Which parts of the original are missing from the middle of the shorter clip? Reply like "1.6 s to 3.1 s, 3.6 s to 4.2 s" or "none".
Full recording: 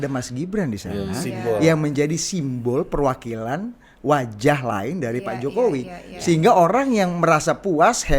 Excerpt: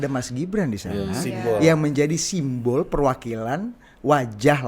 none